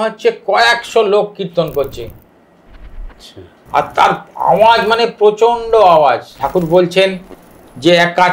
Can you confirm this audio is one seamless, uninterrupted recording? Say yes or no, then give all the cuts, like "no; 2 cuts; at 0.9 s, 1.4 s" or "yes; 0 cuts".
no; 1 cut; at 6.3 s